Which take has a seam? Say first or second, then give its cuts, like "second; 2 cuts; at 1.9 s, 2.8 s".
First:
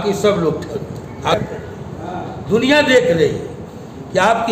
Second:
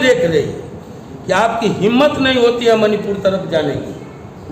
first; 1 cut; at 1.3 s